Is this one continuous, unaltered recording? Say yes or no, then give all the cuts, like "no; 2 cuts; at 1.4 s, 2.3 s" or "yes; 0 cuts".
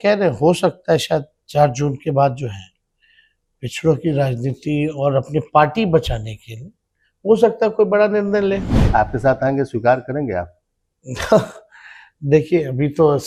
yes; 0 cuts